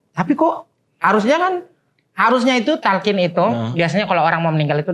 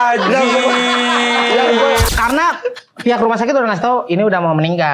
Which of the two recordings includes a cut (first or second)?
second